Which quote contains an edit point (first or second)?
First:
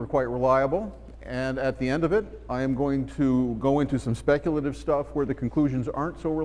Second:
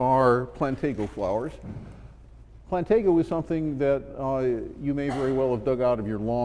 first